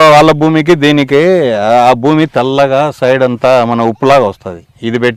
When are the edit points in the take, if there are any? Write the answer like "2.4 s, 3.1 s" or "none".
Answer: none